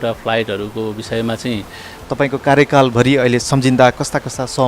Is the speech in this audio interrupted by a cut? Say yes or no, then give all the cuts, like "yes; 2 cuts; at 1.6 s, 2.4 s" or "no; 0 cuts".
yes; 1 cut; at 2.0 s